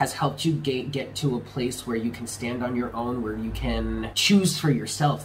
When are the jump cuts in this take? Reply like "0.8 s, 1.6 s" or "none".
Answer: 4.2 s